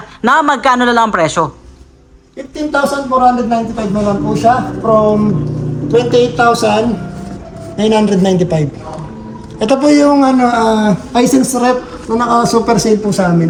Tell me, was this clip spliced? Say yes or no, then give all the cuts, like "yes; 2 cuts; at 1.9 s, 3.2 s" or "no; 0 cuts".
no; 0 cuts